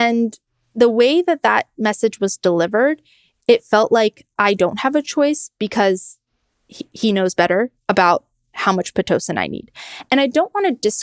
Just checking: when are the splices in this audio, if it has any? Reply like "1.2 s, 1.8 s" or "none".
none